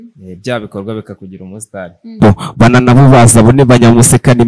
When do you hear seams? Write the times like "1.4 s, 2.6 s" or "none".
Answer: 2.2 s